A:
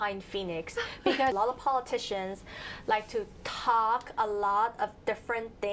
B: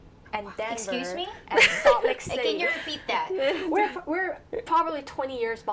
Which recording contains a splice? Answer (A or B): A